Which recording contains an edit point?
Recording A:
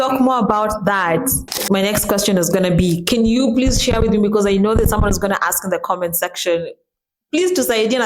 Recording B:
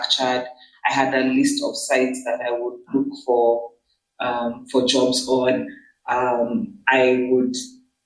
A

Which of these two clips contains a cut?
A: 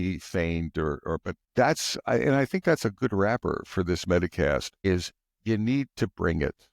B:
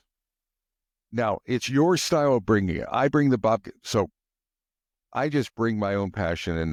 A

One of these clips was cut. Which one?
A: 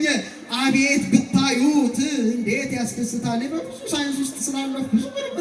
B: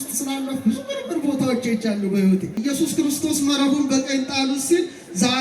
B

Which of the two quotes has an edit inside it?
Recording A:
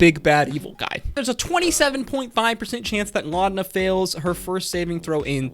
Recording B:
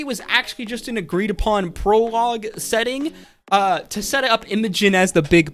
A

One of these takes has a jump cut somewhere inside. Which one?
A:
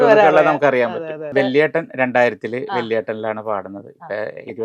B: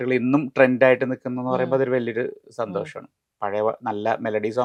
A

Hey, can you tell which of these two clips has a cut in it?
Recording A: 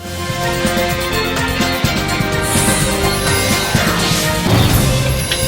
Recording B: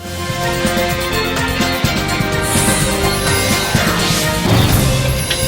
A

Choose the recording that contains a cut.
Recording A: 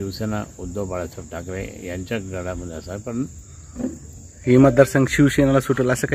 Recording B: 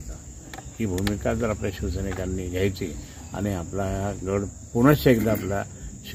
A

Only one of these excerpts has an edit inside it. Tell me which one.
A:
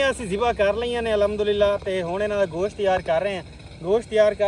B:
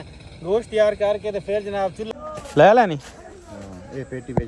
B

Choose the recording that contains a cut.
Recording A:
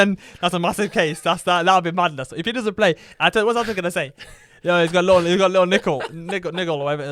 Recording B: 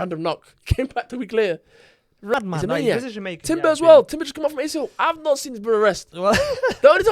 B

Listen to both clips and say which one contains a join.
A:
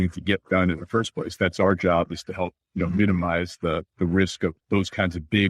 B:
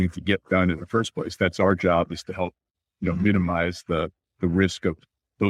A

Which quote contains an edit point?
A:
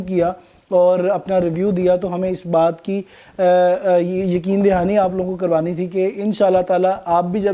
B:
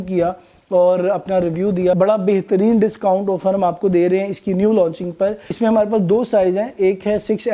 B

